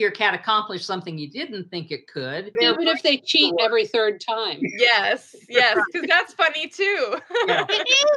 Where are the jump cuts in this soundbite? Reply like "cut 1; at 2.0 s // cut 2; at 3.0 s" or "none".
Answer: cut 1; at 2.5 s